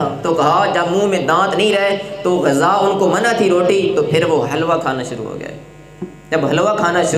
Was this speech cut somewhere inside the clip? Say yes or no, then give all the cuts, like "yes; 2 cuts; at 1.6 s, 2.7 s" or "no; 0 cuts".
no; 0 cuts